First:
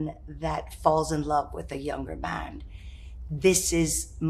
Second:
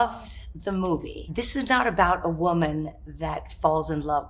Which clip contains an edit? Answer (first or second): second